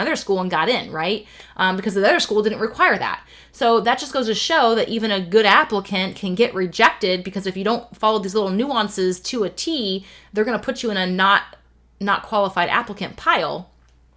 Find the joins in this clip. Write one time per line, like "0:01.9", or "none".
none

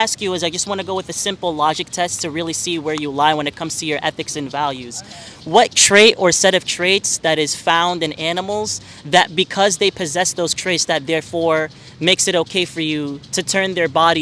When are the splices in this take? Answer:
none

